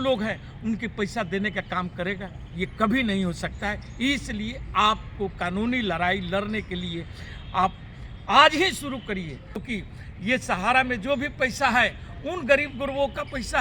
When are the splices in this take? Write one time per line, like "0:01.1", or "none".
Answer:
0:09.6